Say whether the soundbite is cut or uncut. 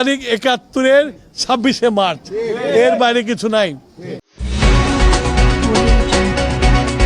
uncut